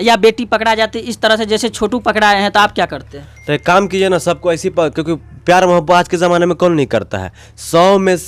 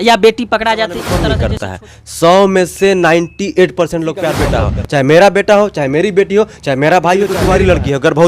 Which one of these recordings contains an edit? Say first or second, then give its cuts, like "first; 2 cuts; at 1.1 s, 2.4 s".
second; 3 cuts; at 1.2 s, 4.4 s, 7.4 s